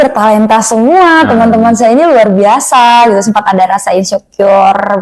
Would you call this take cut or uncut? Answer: uncut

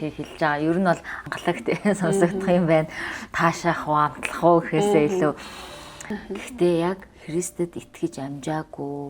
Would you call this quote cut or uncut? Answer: cut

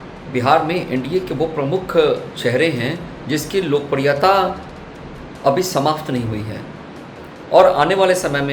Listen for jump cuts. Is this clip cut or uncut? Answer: uncut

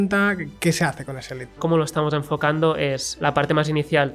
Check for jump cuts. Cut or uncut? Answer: cut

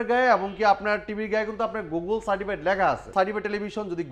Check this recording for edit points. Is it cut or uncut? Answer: cut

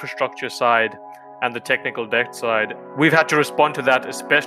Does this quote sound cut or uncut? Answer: cut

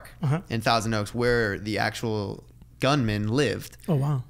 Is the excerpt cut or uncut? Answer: uncut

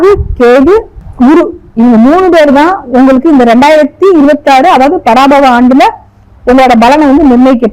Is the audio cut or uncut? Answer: cut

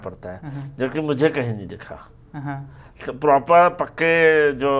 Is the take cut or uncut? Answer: uncut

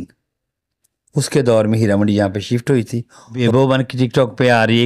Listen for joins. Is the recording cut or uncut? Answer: cut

